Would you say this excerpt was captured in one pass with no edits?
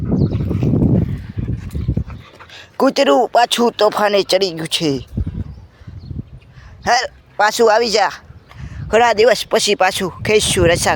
yes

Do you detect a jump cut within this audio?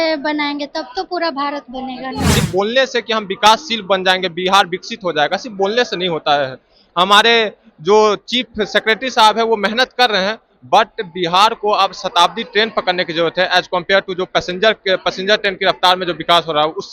yes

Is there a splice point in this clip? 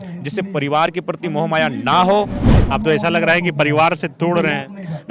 yes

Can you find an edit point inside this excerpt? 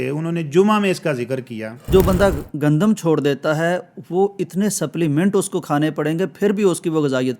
yes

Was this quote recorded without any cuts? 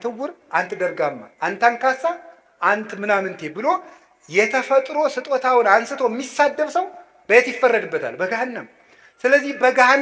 yes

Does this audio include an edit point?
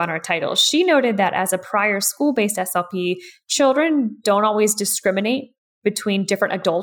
no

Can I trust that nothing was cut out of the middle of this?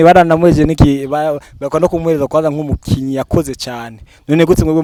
yes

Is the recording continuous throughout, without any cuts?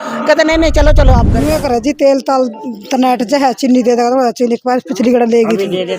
no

